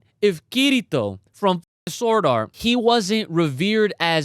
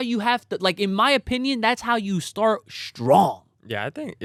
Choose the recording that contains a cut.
first; 1 cut; at 2.5 s

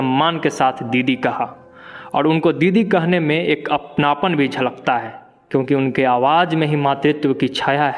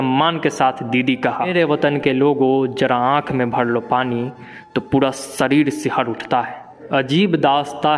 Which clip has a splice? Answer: second; 2 cuts; at 1.5 s, 6.8 s

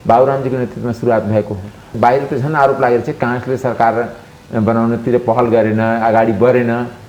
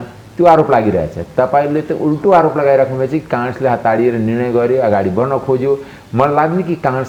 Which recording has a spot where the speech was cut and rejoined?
first; 1 cut; at 1.9 s

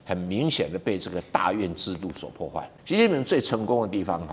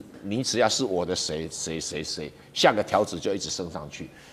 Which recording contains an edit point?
first; 1 cut; at 2.7 s

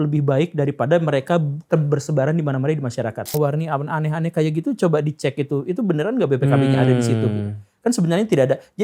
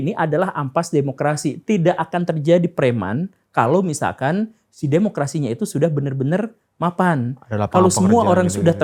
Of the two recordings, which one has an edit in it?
first; 1 cut; at 3.3 s

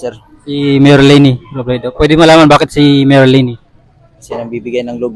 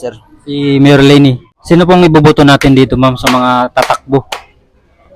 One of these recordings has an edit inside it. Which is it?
second; 1 cut; at 1.5 s

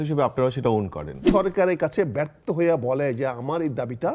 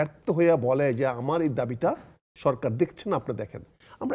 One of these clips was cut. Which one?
first; 1 cut; at 1.3 s

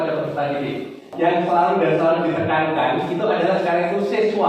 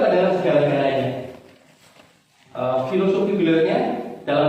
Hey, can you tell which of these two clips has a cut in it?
first; 1 cut; at 1.0 s

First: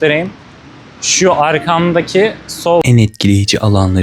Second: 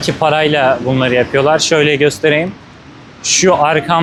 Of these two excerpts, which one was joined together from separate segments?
first; 1 cut; at 2.9 s

